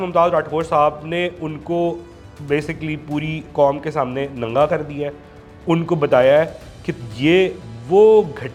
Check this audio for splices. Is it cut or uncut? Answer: uncut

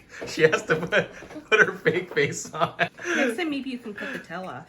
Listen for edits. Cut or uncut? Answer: cut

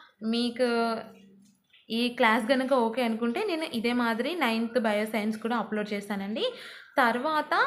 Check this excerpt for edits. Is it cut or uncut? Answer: uncut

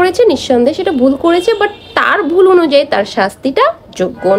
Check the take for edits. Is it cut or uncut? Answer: uncut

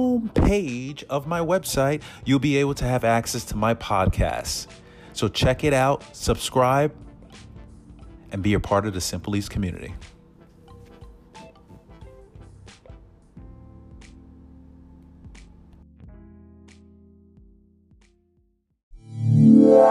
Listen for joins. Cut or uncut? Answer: cut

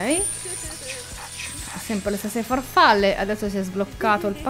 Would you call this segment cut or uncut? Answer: uncut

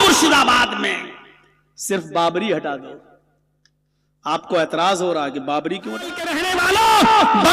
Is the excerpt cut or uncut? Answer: cut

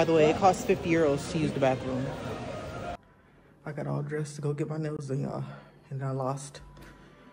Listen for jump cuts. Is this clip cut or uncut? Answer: cut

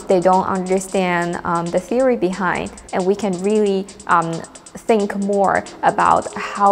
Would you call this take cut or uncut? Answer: cut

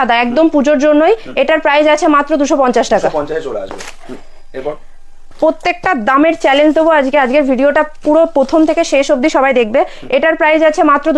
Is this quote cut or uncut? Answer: uncut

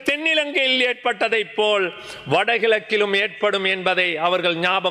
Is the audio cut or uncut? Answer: uncut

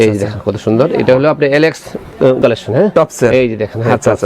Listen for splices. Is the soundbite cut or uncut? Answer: cut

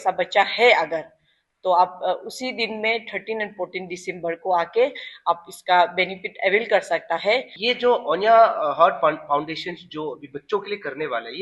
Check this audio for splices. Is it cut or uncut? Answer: cut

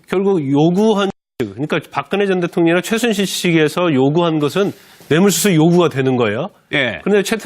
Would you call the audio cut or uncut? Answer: uncut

